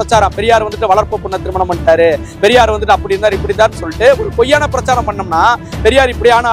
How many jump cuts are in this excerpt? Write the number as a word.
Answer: zero